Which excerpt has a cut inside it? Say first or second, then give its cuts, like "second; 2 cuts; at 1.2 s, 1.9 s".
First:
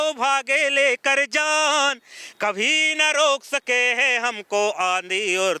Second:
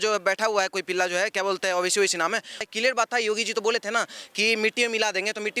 second; 1 cut; at 2.7 s